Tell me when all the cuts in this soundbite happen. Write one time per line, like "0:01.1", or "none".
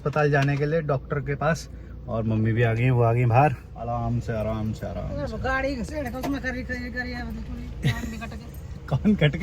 0:03.7